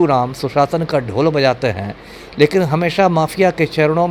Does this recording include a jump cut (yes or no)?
no